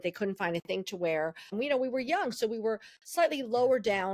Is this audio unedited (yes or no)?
no